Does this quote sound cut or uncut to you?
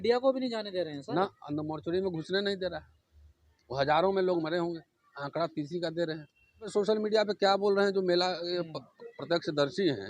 cut